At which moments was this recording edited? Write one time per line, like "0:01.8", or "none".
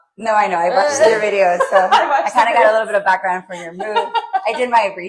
none